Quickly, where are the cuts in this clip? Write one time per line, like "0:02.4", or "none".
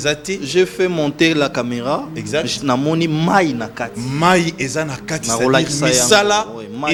none